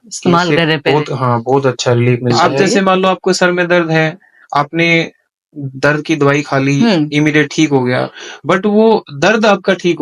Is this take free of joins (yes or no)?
no